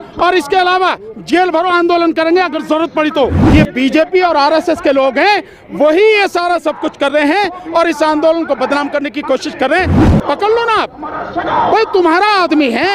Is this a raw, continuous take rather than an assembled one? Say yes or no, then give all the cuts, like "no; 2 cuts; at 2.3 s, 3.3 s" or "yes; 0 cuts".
no; 2 cuts; at 3.4 s, 10.0 s